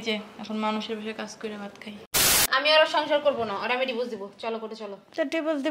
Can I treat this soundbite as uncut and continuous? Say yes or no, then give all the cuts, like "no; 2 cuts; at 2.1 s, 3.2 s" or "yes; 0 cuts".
no; 1 cut; at 2.4 s